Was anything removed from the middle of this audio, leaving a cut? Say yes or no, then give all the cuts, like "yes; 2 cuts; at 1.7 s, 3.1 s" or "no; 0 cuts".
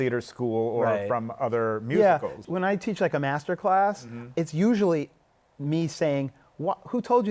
yes; 2 cuts; at 2.4 s, 4.2 s